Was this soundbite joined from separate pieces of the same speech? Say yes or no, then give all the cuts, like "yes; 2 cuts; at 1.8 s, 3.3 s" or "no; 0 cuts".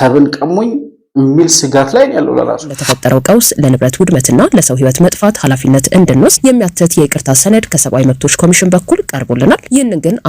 yes; 1 cut; at 2.9 s